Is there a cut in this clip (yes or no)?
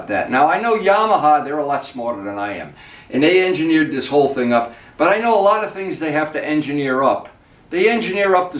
no